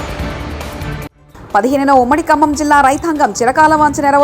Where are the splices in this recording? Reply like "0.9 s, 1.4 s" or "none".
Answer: 1.2 s